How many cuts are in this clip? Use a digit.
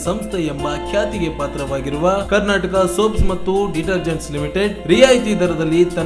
0